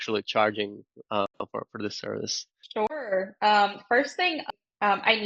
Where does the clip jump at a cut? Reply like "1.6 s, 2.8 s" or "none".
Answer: none